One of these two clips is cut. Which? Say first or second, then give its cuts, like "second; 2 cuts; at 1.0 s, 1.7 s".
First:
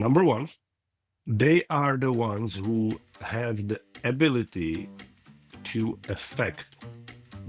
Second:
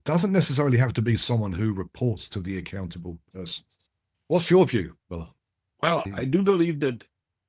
second; 1 cut; at 6.1 s